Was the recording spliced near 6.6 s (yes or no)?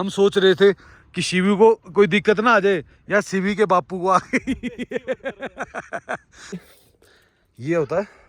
yes